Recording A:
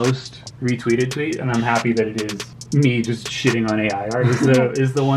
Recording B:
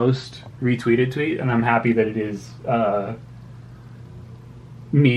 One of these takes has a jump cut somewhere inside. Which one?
A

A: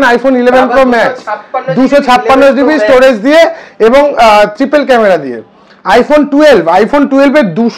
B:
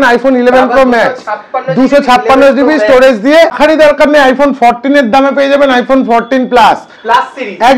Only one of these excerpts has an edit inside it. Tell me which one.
B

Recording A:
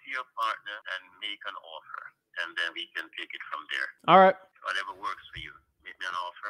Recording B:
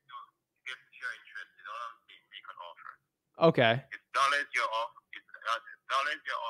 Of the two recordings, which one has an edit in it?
A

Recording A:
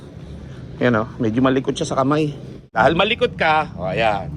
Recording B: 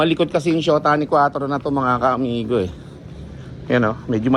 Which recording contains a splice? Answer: A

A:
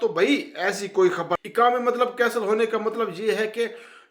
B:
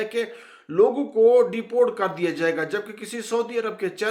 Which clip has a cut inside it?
A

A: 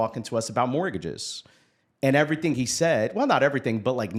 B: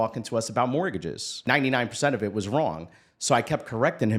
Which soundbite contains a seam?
B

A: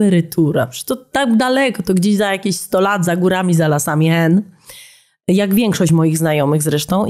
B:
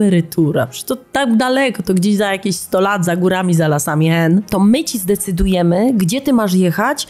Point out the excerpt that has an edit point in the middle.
B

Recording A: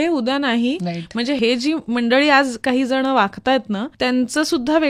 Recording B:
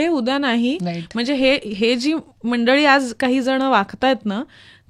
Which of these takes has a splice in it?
A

